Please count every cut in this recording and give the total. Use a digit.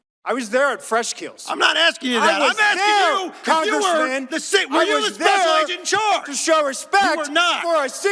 0